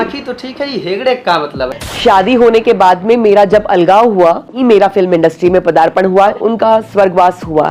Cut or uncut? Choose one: cut